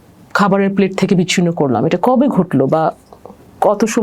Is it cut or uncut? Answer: uncut